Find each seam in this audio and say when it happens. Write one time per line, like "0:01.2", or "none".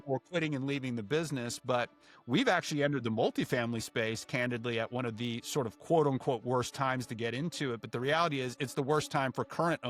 none